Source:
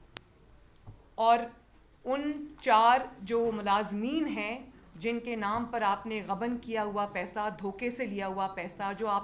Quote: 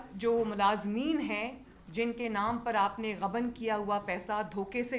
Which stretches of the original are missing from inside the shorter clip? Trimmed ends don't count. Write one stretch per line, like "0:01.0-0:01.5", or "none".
none